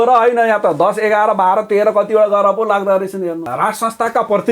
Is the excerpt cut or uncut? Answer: cut